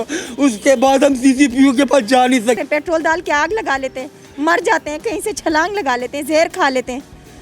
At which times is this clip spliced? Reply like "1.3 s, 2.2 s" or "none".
2.6 s